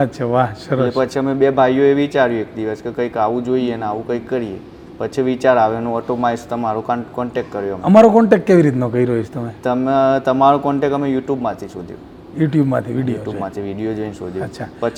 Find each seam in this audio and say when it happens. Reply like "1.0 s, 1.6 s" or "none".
none